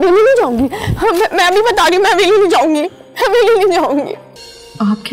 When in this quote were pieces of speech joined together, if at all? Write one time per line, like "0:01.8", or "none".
0:04.2